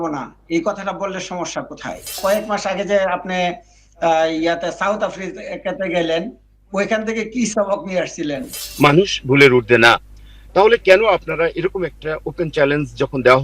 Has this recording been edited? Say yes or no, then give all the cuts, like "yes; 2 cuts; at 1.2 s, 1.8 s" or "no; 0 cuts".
yes; 2 cuts; at 2.2 s, 8.5 s